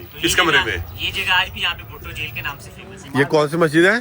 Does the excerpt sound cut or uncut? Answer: cut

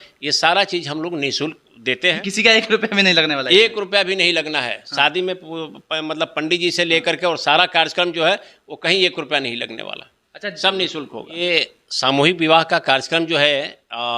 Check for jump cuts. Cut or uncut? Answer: cut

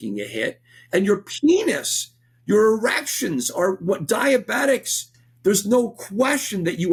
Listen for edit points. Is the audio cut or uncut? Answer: uncut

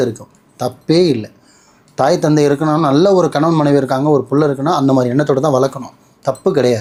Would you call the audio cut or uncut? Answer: uncut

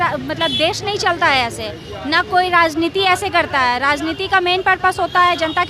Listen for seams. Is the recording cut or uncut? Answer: uncut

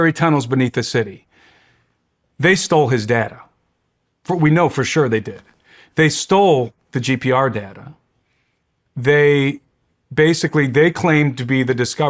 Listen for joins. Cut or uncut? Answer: uncut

